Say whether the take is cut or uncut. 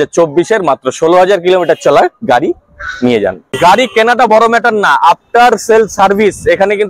cut